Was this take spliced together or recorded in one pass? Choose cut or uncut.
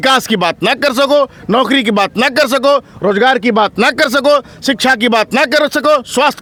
uncut